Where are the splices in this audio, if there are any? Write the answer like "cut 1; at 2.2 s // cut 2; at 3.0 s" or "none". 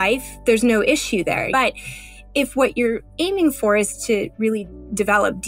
cut 1; at 1.5 s